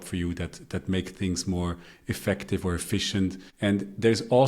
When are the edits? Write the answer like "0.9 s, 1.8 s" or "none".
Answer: 3.5 s